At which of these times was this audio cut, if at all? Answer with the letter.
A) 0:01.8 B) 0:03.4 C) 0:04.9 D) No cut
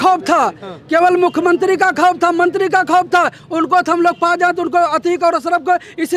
D